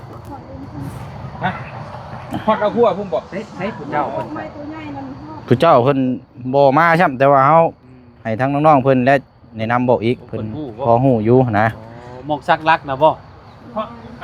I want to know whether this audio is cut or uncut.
uncut